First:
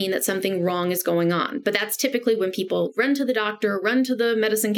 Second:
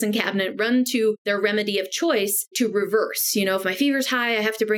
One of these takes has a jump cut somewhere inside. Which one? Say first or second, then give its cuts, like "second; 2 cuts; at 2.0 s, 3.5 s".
second; 2 cuts; at 1.2 s, 2.5 s